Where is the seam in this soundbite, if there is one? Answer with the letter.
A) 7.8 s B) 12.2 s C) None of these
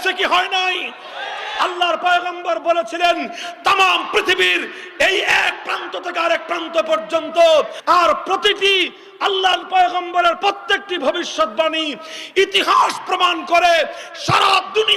A